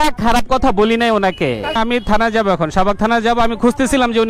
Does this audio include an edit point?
no; 0 cuts

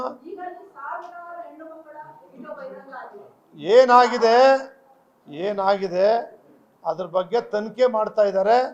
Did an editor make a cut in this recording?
no; 0 cuts

